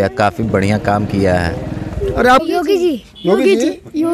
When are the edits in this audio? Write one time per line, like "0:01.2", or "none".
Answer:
0:02.4